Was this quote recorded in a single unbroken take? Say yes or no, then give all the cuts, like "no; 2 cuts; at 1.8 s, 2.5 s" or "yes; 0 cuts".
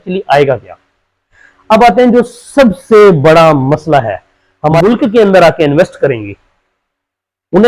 no; 1 cut; at 4.8 s